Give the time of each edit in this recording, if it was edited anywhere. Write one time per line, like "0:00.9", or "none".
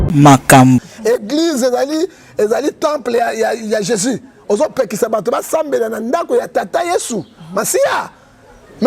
0:00.9